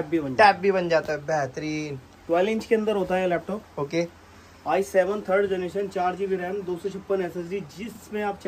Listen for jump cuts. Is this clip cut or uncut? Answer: uncut